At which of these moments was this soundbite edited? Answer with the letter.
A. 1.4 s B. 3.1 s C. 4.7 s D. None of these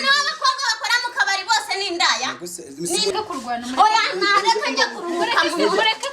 B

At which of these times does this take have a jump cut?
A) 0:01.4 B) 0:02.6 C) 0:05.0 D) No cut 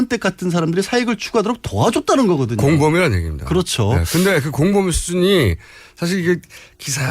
C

